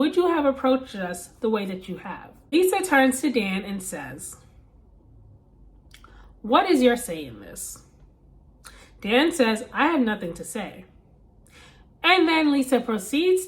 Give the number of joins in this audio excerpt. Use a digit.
1